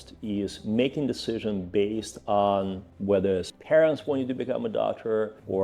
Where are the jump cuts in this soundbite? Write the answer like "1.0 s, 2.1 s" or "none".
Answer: 3.5 s

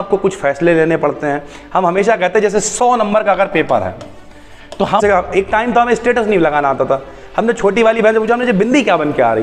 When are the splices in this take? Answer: 5.0 s

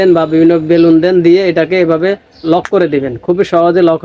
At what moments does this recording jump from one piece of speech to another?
none

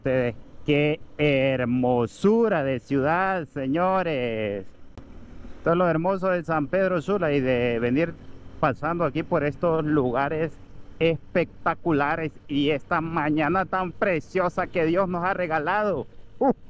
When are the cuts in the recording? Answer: none

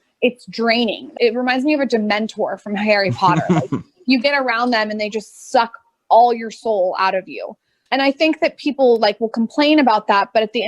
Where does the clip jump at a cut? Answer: 1.1 s

